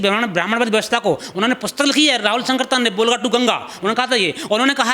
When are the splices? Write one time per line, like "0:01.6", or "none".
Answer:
none